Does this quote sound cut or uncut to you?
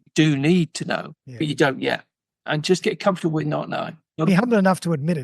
cut